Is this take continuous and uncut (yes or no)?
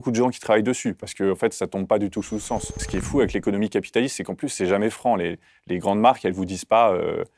no